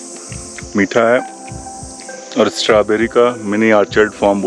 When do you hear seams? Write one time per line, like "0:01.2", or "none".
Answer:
none

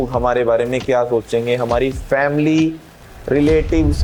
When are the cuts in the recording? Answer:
none

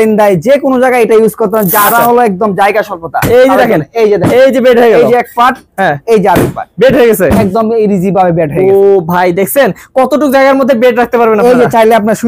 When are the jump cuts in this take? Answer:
none

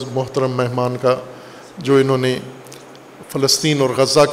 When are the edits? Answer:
none

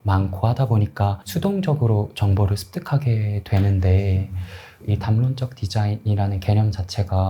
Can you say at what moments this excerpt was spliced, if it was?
0:01.2
0:04.8

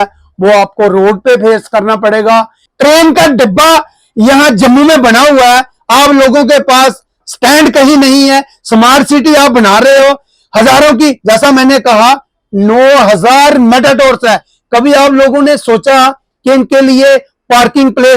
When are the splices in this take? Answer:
0:02.7

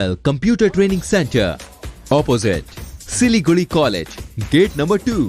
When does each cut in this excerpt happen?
none

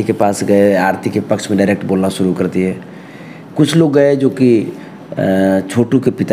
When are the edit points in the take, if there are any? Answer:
none

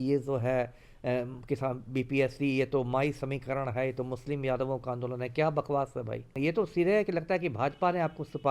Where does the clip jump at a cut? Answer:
0:06.3

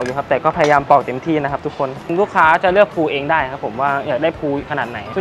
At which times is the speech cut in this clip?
none

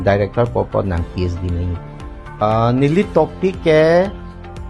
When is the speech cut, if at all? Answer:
0:02.4

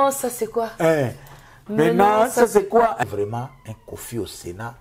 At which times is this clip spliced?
0:03.0

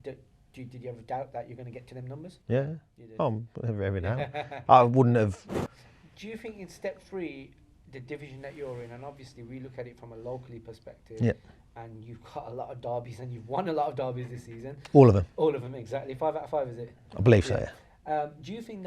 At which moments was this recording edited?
0:05.5

